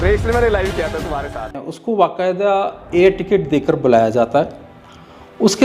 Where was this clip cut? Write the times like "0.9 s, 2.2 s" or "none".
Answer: 1.7 s